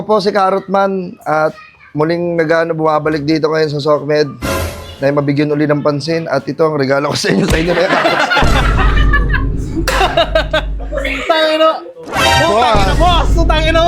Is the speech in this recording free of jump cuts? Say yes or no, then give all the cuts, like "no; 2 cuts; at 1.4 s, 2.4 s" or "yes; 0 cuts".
yes; 0 cuts